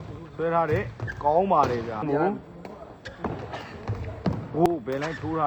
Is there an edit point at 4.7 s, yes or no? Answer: yes